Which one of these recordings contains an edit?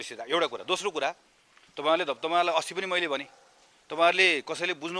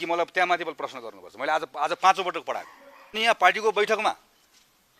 second; 1 cut; at 3.2 s

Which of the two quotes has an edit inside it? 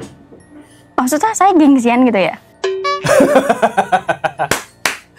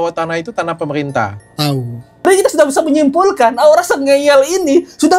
second; 1 cut; at 2.3 s

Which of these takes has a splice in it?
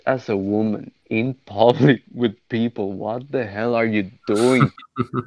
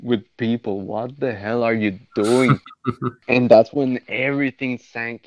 first; 1 cut; at 0.9 s

